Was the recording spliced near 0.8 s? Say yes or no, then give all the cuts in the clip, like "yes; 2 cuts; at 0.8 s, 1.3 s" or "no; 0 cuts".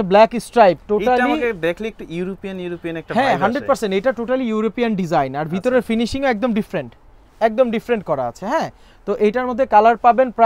no; 0 cuts